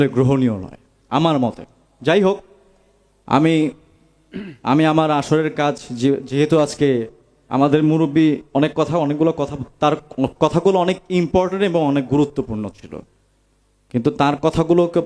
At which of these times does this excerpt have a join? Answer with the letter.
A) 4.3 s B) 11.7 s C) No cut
C